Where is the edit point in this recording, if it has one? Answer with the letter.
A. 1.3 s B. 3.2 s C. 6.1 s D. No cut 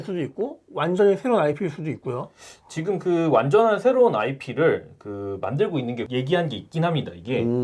C